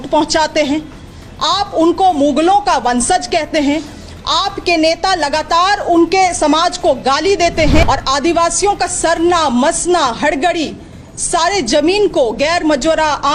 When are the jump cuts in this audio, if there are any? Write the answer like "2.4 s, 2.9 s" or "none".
7.8 s